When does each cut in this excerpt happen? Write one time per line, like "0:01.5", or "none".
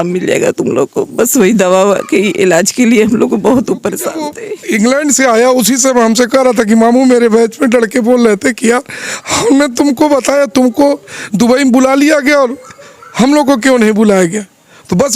0:04.4